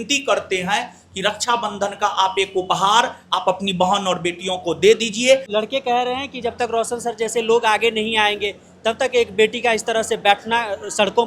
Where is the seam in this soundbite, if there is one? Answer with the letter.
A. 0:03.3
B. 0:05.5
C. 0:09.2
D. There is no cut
B